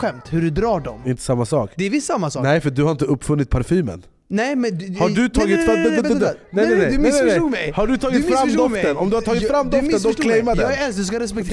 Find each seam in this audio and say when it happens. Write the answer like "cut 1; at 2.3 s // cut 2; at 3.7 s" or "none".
cut 1; at 1.0 s